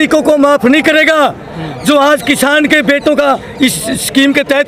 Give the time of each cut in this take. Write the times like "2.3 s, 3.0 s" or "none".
none